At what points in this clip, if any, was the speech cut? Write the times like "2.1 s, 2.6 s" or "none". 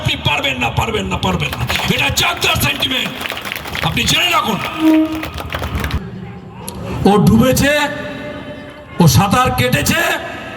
5.9 s